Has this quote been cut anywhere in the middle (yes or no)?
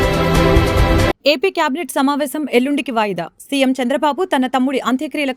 yes